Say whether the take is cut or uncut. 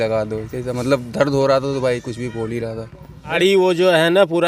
cut